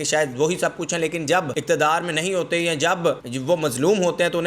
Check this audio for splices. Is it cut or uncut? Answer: cut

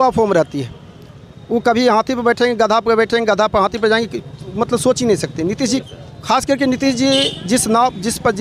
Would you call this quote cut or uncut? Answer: cut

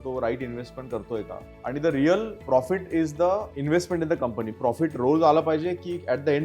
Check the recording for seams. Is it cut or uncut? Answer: cut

